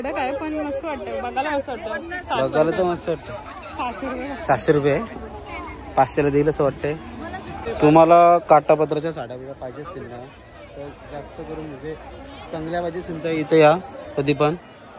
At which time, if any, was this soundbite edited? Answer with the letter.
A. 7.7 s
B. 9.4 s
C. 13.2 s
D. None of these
A